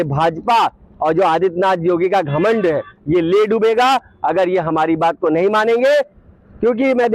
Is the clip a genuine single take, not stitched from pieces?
yes; 0 cuts

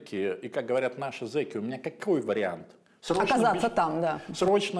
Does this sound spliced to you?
no; 0 cuts

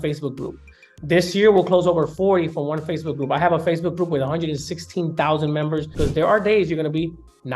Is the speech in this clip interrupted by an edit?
yes; 1 cut; at 5.9 s

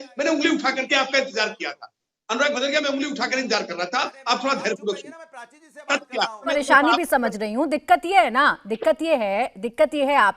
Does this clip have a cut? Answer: yes; 1 cut; at 6.5 s

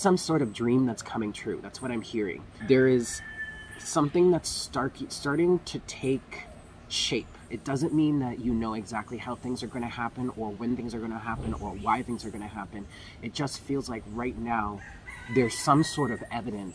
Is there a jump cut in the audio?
yes; 2 cuts; at 2.5 s, 7.5 s

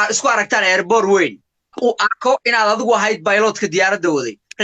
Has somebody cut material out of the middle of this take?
yes; 1 cut; at 1.7 s

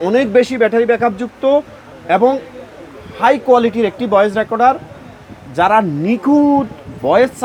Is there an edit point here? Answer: no; 0 cuts

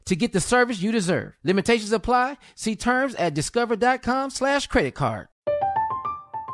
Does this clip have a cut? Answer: yes; 1 cut; at 5.3 s

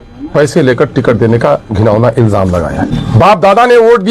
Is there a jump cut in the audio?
yes; 1 cut; at 2.9 s

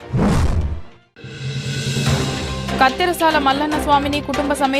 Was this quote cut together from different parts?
yes; 1 cut; at 2.8 s

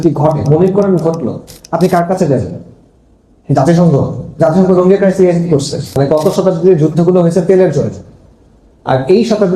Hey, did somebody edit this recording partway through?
yes; 1 cut; at 5.9 s

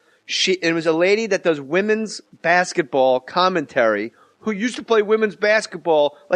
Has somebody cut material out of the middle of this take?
yes; 1 cut; at 2.6 s

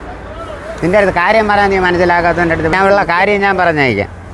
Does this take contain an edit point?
yes; 1 cut; at 2.7 s

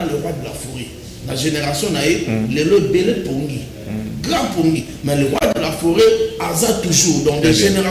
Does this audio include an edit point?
no; 0 cuts

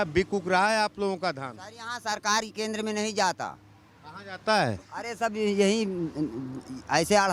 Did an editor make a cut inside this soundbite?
no; 0 cuts

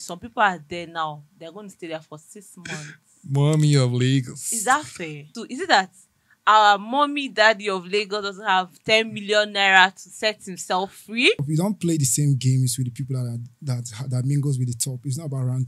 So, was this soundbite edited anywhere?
yes; 2 cuts; at 5.4 s, 11.4 s

